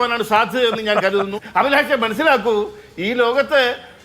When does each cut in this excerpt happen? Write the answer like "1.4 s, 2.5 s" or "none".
1.4 s